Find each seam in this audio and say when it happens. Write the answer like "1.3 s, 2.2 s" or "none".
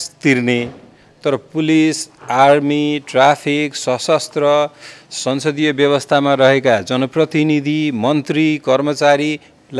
none